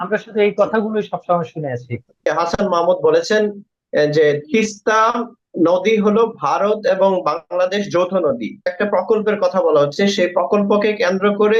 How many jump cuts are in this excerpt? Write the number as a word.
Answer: two